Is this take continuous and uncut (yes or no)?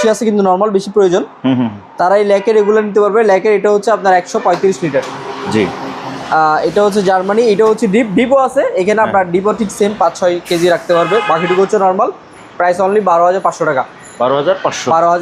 yes